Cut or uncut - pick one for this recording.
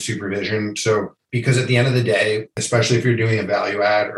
cut